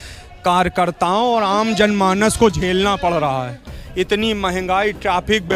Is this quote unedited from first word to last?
yes; 0 cuts

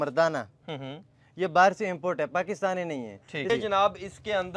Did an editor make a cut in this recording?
yes; 1 cut; at 3.5 s

